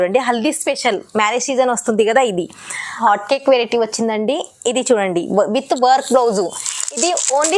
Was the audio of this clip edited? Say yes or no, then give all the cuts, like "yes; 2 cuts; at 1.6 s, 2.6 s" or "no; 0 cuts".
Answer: yes; 1 cut; at 3.0 s